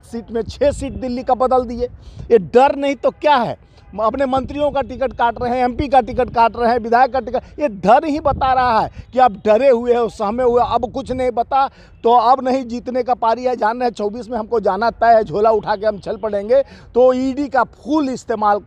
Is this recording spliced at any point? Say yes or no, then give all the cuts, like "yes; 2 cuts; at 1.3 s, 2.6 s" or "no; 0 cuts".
no; 0 cuts